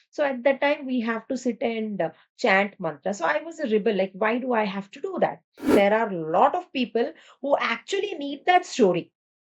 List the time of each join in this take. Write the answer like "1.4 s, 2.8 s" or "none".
5.7 s